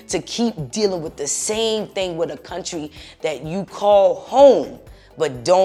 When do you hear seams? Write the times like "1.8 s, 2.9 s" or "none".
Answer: none